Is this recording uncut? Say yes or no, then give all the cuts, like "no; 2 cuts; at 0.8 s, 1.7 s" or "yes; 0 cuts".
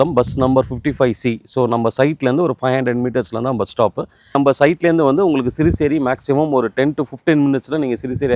no; 1 cut; at 4.4 s